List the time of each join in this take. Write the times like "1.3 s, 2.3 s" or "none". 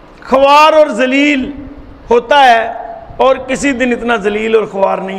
none

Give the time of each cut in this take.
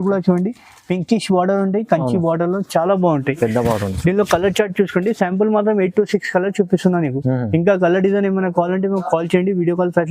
none

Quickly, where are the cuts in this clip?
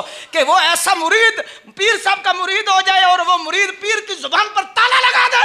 none

